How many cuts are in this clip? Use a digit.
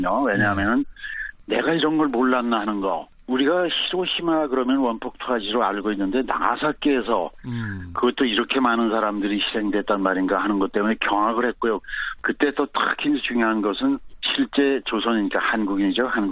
1